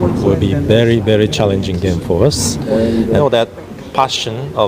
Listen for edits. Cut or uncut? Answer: cut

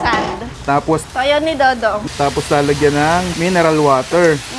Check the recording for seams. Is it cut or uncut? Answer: cut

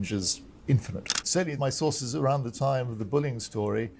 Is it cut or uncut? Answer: cut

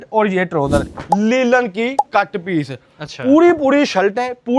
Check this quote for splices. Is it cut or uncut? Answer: cut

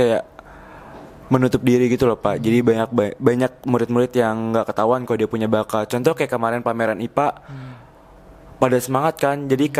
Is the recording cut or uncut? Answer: uncut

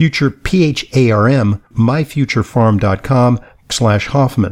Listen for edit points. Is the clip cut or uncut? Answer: cut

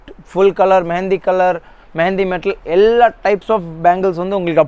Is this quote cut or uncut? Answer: uncut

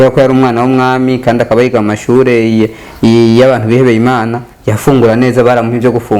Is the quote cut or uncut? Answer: uncut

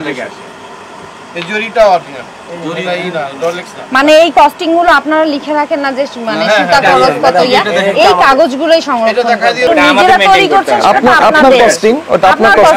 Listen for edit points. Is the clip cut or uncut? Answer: cut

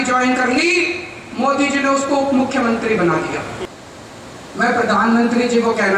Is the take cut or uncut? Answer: cut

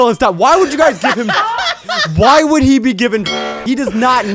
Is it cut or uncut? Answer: cut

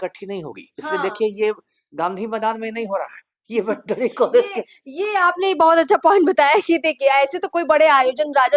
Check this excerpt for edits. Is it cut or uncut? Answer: uncut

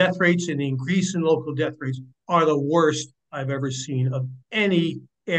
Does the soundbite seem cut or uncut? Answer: uncut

